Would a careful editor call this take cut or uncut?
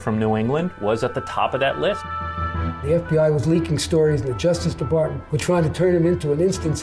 cut